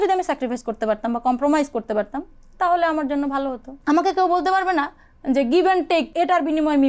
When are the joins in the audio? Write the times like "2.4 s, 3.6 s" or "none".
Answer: 3.7 s, 6.1 s